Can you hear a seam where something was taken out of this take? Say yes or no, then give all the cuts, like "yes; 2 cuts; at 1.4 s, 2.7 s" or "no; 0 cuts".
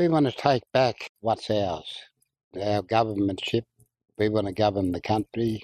yes; 2 cuts; at 1.1 s, 2.5 s